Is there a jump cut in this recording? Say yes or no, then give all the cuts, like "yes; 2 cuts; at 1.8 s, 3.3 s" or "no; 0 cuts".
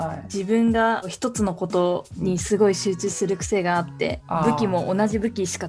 no; 0 cuts